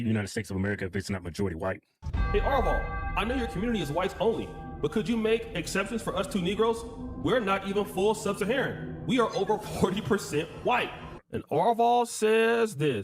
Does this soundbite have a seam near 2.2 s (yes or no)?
yes